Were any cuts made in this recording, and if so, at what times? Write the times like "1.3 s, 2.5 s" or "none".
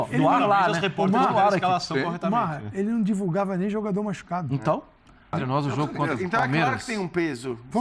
5.4 s